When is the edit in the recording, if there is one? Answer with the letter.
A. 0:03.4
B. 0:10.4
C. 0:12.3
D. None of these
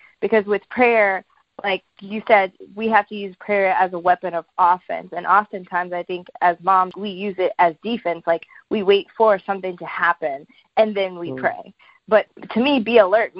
C